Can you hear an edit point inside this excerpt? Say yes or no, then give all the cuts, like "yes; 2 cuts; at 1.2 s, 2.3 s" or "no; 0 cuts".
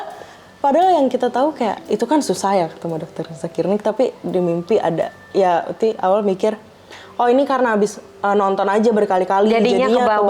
no; 0 cuts